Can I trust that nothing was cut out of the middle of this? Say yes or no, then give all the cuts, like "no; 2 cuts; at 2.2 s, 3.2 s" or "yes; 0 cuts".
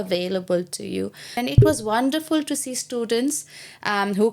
no; 1 cut; at 1.4 s